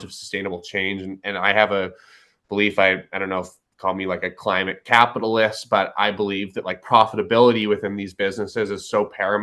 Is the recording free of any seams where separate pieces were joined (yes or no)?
yes